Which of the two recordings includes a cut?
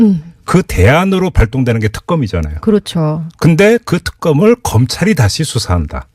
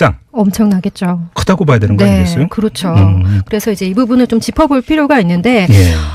first; 1 cut; at 2.0 s

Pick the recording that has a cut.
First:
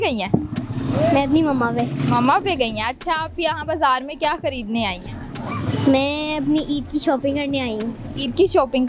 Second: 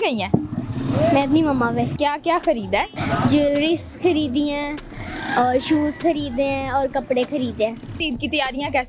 second; 3 cuts; at 1.9 s, 3.0 s, 7.9 s

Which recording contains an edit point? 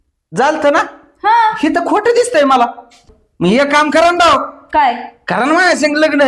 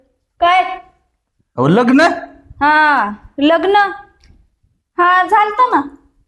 first; 1 cut; at 3.2 s

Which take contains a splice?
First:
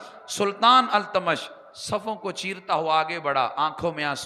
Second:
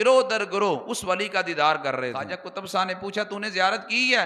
second; 1 cut; at 2.2 s

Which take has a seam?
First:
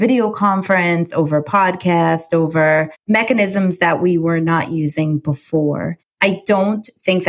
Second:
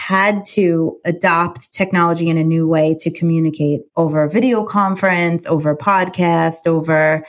second; 1 cut; at 1.0 s

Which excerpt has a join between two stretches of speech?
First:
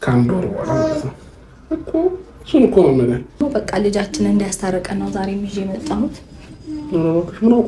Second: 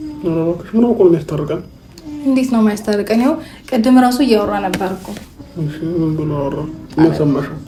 first; 1 cut; at 3.4 s

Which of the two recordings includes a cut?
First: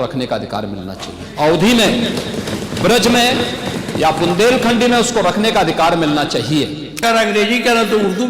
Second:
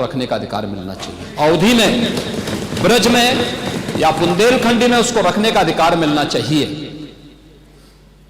first; 1 cut; at 7.0 s

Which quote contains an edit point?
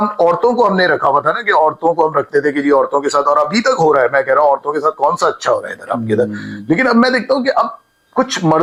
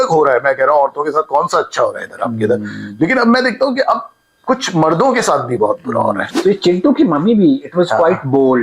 second; 1 cut; at 6.3 s

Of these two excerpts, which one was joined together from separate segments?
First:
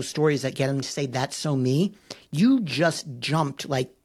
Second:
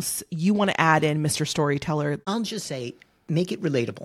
second; 1 cut; at 2.2 s

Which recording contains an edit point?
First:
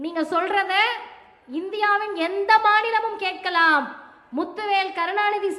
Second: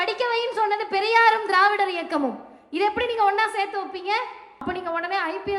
second; 1 cut; at 4.6 s

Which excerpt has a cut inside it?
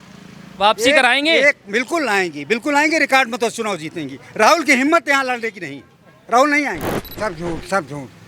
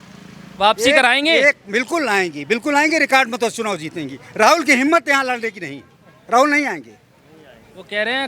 first; 1 cut; at 7.1 s

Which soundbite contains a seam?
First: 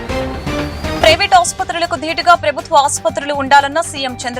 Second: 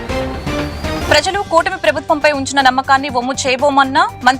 second; 1 cut; at 1.0 s

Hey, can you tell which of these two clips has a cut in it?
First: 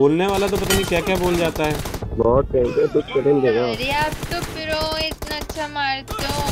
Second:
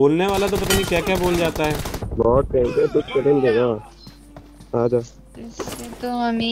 first; 1 cut; at 3.8 s

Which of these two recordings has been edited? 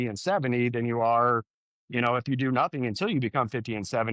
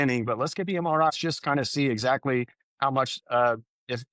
second; 1 cut; at 1.1 s

